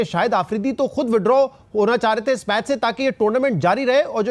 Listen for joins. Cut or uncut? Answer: uncut